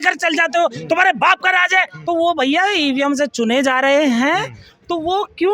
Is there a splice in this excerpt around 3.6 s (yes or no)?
no